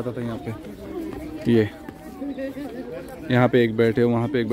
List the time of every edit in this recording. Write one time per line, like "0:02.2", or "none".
none